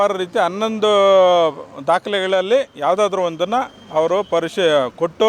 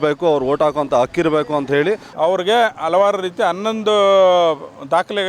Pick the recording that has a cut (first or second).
second